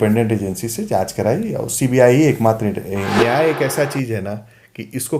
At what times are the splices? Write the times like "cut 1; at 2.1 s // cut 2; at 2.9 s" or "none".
cut 1; at 3.2 s